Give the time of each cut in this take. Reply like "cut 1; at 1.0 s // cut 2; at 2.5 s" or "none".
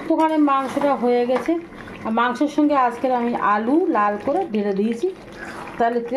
none